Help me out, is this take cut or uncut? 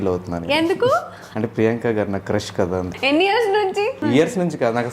cut